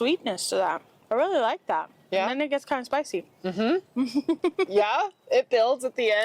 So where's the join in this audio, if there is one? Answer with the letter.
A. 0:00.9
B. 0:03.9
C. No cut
A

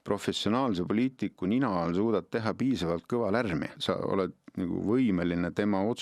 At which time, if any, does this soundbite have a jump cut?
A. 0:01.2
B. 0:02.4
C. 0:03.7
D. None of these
C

